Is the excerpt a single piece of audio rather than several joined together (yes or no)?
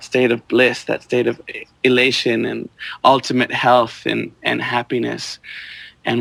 yes